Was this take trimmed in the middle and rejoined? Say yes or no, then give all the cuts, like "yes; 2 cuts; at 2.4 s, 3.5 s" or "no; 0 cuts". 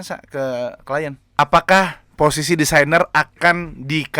yes; 1 cut; at 1.2 s